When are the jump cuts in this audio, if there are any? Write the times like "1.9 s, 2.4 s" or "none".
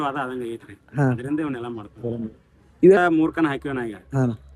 3.0 s